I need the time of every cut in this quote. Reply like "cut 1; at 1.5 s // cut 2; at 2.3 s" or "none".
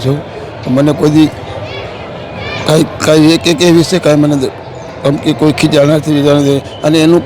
none